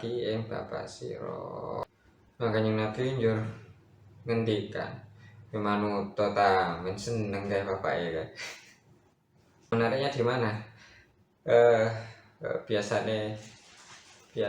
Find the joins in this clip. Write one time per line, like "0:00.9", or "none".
0:01.8
0:09.7